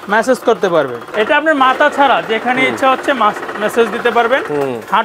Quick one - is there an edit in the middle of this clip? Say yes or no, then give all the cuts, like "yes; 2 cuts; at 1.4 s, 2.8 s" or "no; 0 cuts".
yes; 1 cut; at 1.0 s